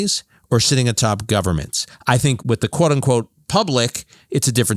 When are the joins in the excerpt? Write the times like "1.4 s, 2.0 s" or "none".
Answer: 2.4 s